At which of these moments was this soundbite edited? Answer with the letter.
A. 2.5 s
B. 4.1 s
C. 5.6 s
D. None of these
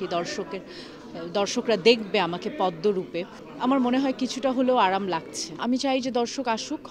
C